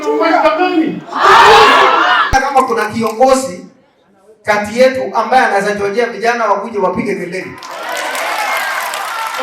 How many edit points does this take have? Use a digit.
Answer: 1